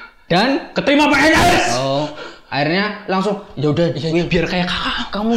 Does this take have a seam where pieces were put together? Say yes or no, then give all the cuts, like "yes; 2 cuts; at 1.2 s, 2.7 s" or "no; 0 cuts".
no; 0 cuts